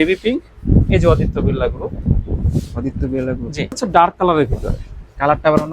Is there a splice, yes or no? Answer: yes